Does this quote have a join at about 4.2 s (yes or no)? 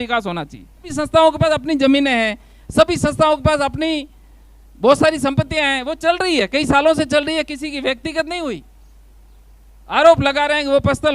no